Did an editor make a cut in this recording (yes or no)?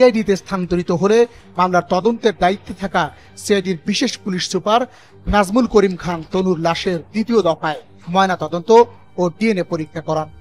no